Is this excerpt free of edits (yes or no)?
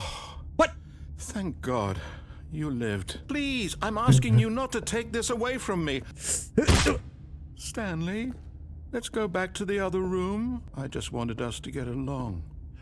no